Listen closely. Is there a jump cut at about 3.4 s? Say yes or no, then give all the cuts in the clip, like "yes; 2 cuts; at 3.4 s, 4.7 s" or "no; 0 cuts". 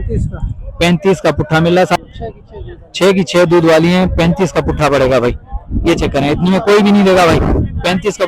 no; 1 cut; at 2.0 s